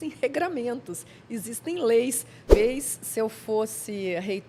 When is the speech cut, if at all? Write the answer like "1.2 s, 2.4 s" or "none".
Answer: 2.5 s